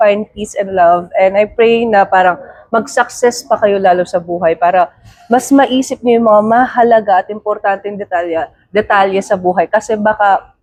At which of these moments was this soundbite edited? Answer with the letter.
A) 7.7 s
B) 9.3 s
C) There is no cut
C